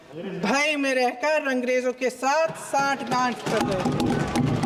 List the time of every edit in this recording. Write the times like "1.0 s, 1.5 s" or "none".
none